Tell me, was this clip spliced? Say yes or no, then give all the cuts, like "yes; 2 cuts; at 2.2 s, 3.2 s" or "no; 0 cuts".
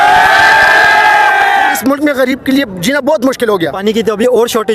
yes; 2 cuts; at 1.8 s, 3.8 s